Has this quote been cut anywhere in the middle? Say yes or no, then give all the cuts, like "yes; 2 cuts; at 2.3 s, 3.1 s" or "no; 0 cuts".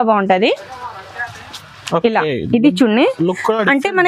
no; 0 cuts